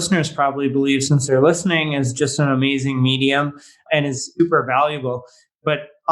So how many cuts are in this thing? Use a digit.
1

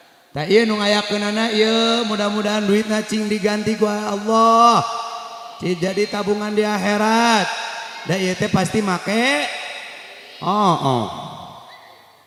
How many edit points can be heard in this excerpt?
0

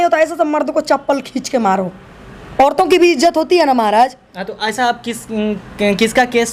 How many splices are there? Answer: 0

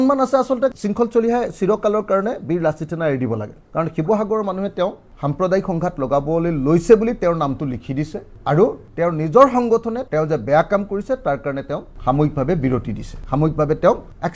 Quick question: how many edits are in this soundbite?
0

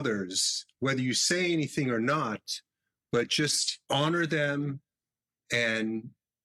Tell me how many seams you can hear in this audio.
1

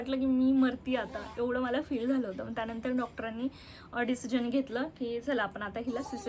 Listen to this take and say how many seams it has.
0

